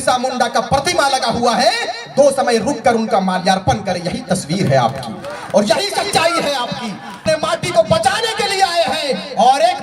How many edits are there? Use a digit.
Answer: 1